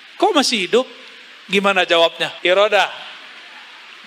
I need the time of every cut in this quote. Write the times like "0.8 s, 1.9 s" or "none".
2.3 s